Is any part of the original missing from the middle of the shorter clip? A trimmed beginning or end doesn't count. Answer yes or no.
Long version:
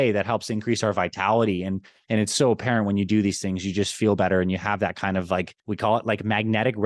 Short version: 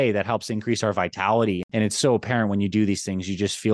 yes